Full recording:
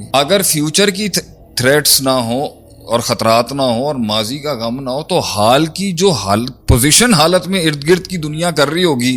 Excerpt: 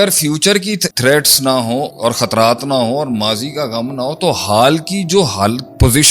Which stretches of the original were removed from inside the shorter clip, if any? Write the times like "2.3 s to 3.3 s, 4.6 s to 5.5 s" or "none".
1.2 s to 1.5 s, 2.5 s to 2.8 s